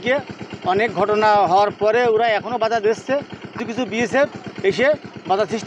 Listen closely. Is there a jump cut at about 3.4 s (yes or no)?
yes